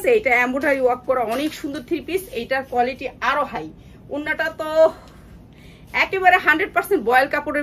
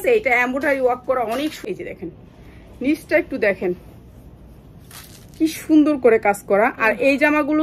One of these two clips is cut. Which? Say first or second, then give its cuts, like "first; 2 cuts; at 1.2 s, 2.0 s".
second; 1 cut; at 1.6 s